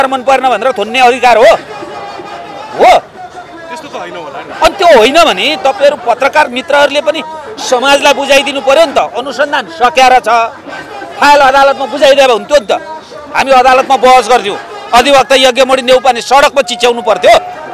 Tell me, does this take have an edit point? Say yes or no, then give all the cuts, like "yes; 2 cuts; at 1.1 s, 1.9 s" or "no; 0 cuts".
no; 0 cuts